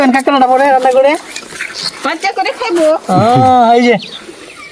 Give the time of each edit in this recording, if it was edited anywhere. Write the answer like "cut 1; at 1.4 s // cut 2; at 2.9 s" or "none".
none